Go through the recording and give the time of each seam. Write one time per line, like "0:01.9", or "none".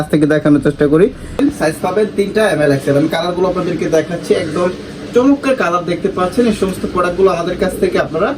0:01.4